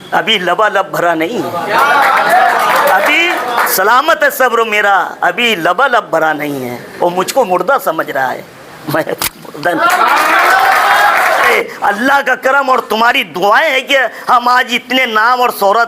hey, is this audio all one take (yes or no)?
no